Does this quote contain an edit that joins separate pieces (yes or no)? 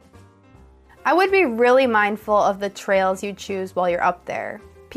yes